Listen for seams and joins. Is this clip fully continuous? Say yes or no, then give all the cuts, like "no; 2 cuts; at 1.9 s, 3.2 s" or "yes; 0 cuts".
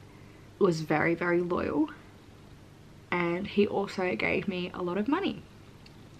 yes; 0 cuts